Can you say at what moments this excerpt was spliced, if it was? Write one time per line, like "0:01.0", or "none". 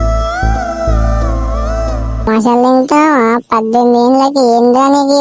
0:02.3